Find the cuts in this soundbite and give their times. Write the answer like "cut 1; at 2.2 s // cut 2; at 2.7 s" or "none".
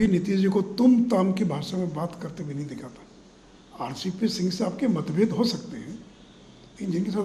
none

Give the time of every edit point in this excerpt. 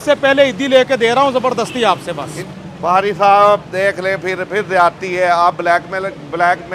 cut 1; at 2.6 s

